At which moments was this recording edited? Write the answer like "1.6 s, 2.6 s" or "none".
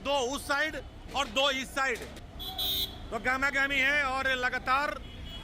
none